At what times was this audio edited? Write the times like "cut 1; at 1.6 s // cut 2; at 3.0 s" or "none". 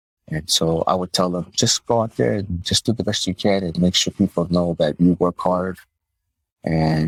none

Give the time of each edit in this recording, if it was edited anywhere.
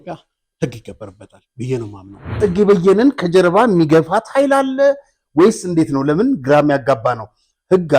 cut 1; at 2.3 s

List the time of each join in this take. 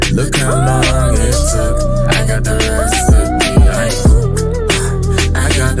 none

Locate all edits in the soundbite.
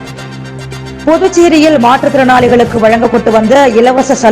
cut 1; at 1.0 s

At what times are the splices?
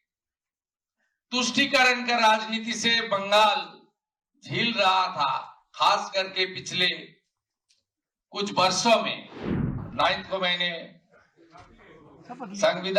cut 1; at 9.8 s

